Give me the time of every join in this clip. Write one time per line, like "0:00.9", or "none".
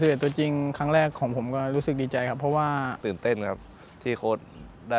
0:02.9